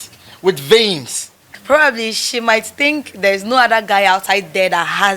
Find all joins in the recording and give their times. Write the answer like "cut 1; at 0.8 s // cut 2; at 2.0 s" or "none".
cut 1; at 1.5 s

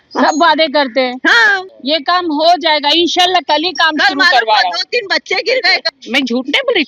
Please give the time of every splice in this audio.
cut 1; at 1.7 s // cut 2; at 5.8 s

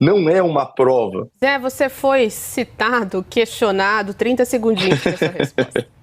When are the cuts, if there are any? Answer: cut 1; at 1.2 s

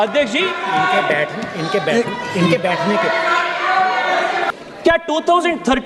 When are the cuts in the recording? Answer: cut 1; at 4.5 s

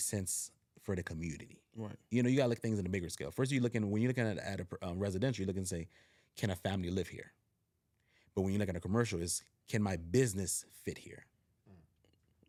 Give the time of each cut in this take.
none

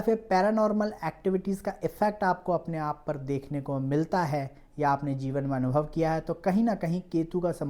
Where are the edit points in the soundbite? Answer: none

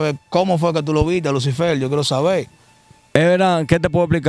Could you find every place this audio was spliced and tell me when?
none

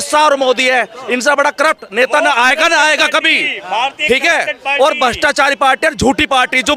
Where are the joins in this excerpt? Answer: none

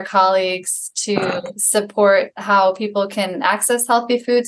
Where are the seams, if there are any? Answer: cut 1; at 1.5 s // cut 2; at 2.4 s

